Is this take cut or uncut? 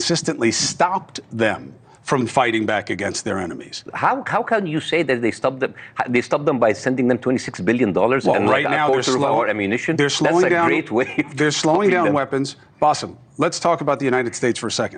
uncut